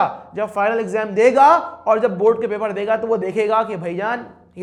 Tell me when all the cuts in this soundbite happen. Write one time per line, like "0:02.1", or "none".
none

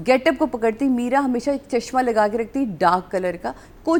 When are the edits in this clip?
none

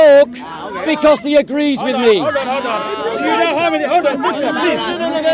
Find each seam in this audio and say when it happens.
none

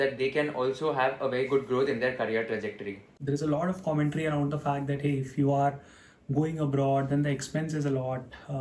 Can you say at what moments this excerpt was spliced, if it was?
0:03.1

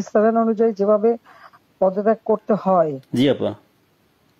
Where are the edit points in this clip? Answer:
none

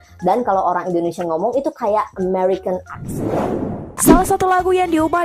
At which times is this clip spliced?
0:04.0

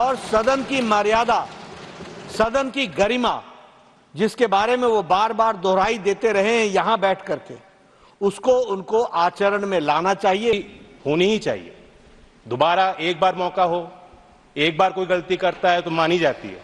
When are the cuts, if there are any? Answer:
0:10.5

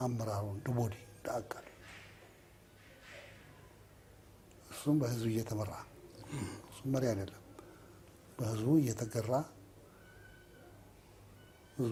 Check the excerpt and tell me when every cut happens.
none

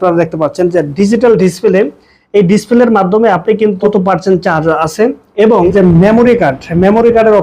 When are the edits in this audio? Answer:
0:03.8
0:05.7

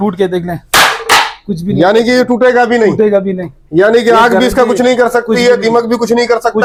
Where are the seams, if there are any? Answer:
none

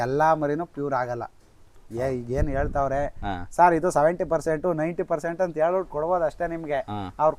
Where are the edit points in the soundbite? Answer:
none

